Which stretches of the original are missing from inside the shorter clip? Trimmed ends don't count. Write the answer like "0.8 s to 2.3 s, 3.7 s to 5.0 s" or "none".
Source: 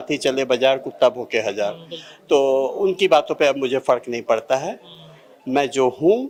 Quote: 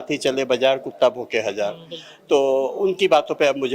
none